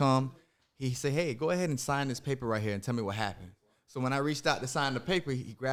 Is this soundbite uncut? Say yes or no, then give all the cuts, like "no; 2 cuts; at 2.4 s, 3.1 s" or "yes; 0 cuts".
yes; 0 cuts